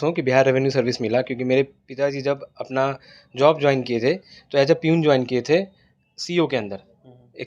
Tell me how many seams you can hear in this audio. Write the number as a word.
zero